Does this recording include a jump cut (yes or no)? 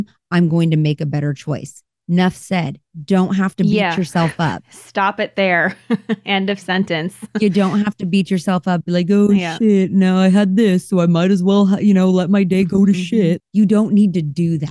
yes